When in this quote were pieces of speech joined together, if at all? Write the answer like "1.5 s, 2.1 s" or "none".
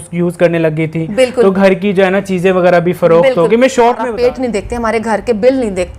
4.1 s